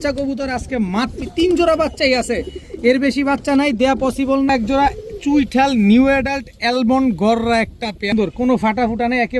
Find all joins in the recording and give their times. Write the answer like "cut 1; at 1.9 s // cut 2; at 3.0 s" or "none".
cut 1; at 1.3 s // cut 2; at 4.5 s // cut 3; at 8.1 s